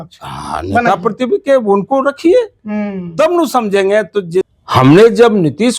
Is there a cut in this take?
yes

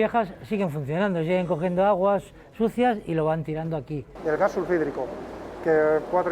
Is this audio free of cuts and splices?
no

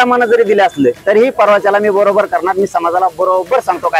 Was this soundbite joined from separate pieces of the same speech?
yes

